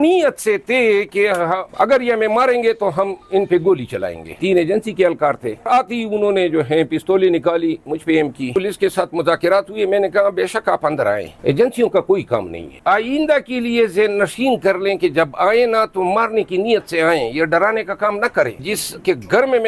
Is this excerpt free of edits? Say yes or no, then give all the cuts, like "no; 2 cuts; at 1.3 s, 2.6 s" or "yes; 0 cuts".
no; 5 cuts; at 4.4 s, 5.7 s, 8.6 s, 12.7 s, 18.6 s